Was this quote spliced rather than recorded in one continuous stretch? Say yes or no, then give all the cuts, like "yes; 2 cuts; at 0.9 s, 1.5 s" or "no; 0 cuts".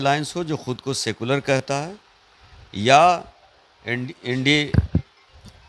no; 0 cuts